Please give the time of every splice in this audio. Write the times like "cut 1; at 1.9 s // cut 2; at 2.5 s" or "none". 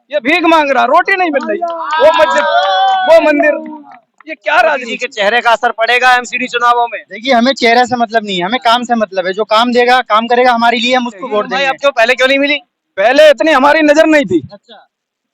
cut 1; at 5.0 s // cut 2; at 11.5 s